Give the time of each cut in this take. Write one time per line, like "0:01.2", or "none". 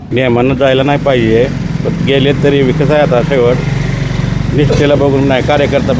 none

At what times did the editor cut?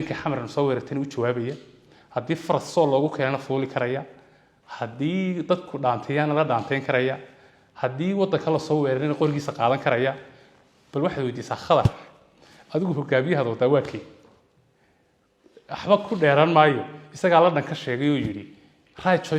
none

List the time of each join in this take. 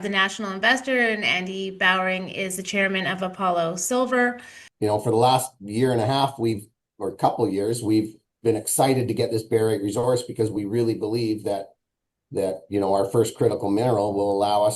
0:04.5

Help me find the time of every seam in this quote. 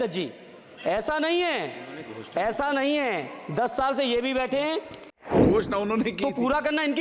0:05.3

